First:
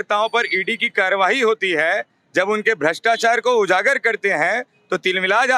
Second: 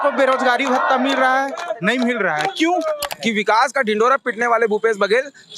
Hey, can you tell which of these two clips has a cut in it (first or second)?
second